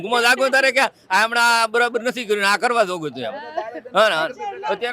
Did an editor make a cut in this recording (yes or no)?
no